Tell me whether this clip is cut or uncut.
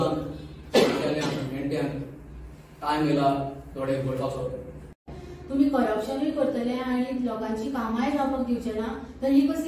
cut